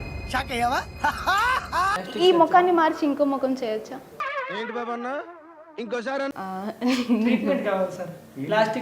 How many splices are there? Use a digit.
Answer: 2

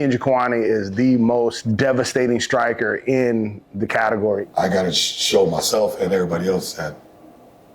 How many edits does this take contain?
2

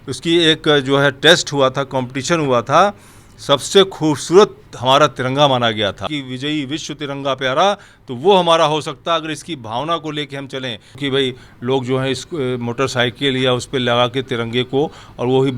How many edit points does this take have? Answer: 2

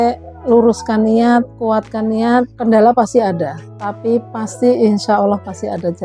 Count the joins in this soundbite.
1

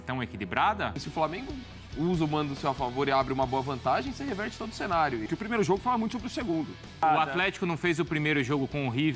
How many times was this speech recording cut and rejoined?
3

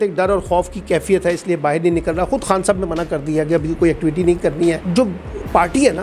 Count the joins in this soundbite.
1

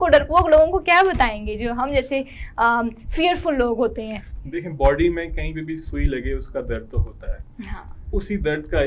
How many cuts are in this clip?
0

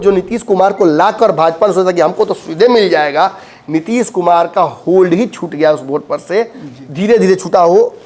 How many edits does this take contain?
0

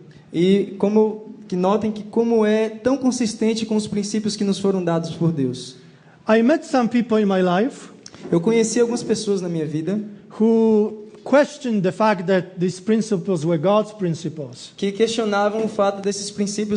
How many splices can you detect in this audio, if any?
1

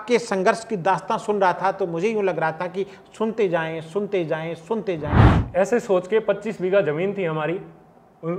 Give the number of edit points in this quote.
1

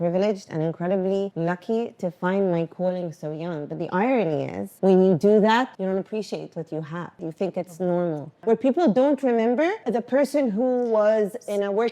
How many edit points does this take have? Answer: 6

